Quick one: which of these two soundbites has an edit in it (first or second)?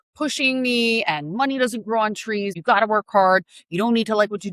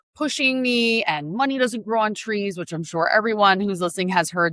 first